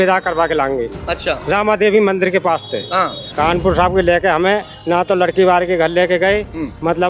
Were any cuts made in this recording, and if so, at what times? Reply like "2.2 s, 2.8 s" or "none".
3.2 s